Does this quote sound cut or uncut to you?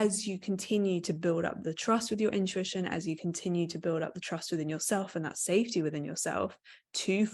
uncut